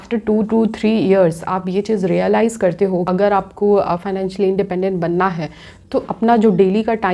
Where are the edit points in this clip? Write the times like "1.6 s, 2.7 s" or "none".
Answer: 3.0 s